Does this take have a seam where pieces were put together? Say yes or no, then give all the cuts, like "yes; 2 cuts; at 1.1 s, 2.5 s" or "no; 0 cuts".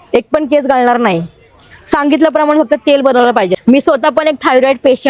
yes; 1 cut; at 3.6 s